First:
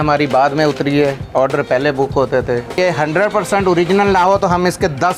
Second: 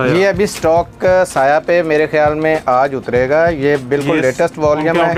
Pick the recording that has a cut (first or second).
first